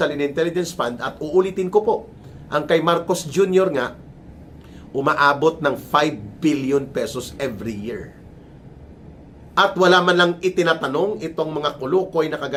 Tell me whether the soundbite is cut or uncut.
uncut